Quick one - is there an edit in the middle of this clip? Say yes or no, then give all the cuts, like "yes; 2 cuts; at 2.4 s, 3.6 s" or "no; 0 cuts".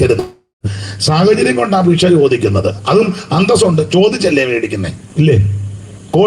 yes; 1 cut; at 5.0 s